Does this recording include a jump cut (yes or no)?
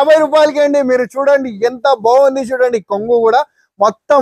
no